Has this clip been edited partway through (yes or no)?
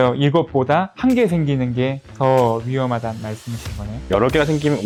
no